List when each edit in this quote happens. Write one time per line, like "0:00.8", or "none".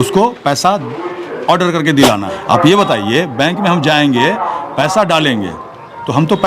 0:02.3